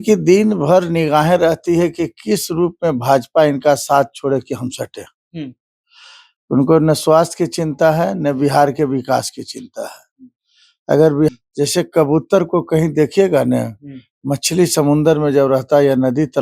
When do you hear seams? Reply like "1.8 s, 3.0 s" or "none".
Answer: 11.3 s